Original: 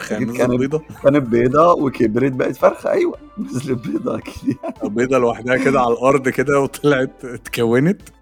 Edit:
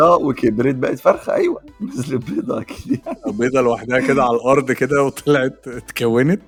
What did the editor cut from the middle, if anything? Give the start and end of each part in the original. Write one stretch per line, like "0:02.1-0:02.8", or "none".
none